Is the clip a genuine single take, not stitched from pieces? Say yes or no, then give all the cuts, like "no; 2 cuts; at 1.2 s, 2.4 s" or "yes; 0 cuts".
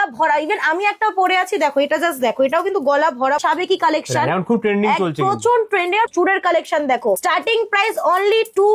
no; 3 cuts; at 3.4 s, 6.1 s, 7.2 s